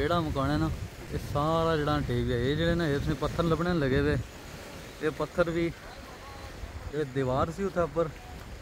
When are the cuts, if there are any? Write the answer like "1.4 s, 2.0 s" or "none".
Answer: 1.1 s